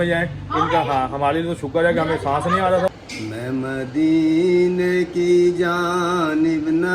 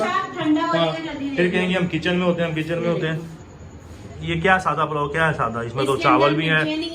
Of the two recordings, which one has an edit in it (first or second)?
first